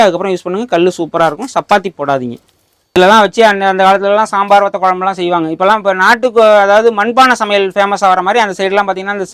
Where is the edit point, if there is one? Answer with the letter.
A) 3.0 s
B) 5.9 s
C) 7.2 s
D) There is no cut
A